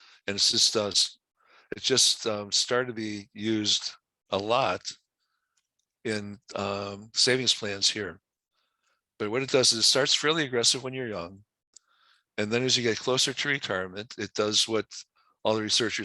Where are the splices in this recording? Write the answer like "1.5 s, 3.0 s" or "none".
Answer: 11.4 s